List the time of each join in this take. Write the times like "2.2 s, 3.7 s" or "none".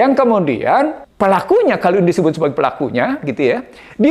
1.0 s